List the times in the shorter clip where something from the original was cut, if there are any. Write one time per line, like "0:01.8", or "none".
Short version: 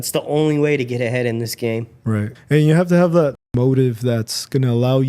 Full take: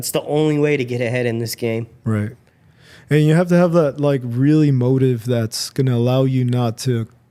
0:02.4
0:03.4